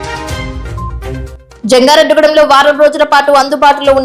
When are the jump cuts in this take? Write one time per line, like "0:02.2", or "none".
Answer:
0:01.0